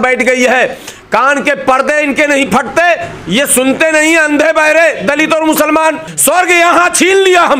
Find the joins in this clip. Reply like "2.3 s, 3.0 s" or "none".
6.1 s